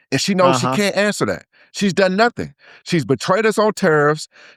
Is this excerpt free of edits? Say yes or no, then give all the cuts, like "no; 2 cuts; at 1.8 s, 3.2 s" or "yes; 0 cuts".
yes; 0 cuts